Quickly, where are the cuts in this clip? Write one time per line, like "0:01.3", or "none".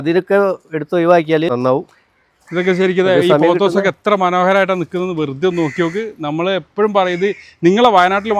0:01.5